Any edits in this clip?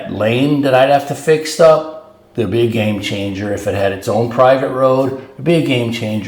no; 0 cuts

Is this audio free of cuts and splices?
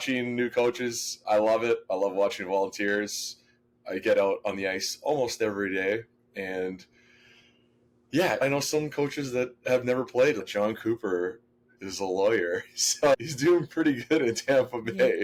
yes; 0 cuts

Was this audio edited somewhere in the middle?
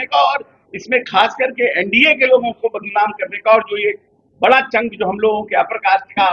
no; 0 cuts

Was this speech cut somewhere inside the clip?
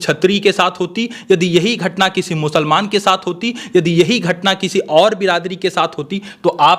no; 0 cuts

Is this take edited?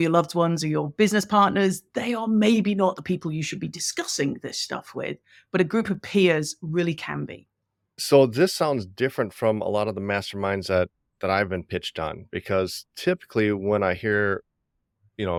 no; 0 cuts

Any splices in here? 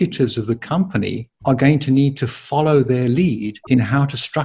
yes; 2 cuts; at 1.3 s, 3.5 s

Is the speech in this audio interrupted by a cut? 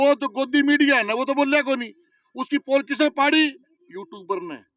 no; 0 cuts

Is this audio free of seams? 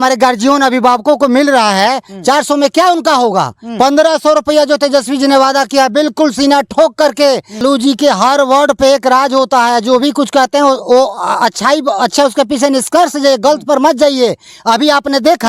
no; 1 cut; at 7.6 s

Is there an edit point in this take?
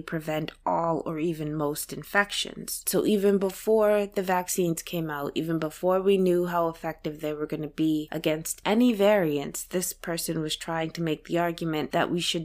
yes; 1 cut; at 2.8 s

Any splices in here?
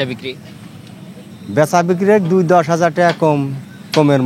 no; 0 cuts

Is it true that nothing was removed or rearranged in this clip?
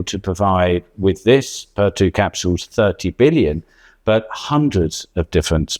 yes; 0 cuts

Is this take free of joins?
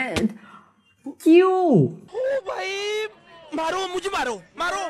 no; 1 cut; at 2.0 s

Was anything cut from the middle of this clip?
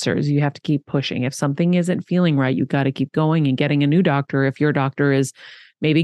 no; 0 cuts

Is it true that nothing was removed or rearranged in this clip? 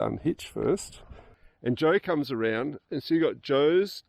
no; 1 cut; at 1.4 s

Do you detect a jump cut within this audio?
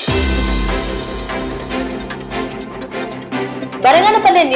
yes; 2 cuts; at 2.3 s, 3.4 s

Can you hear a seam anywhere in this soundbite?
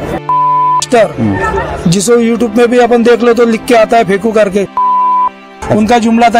no; 0 cuts

